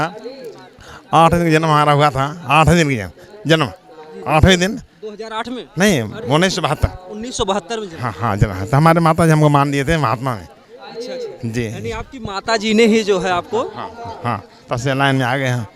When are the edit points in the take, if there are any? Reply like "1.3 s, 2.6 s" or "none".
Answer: none